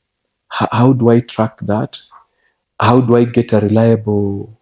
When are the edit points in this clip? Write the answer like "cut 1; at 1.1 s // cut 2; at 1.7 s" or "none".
none